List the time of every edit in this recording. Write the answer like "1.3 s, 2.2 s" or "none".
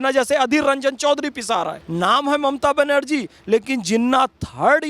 1.8 s